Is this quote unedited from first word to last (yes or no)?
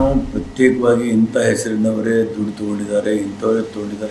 yes